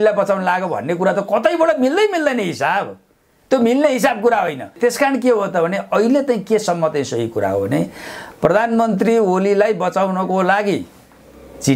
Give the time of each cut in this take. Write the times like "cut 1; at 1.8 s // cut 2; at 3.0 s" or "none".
cut 1; at 4.7 s